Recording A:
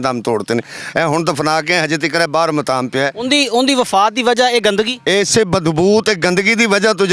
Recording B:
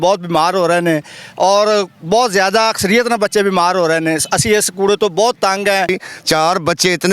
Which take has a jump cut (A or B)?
B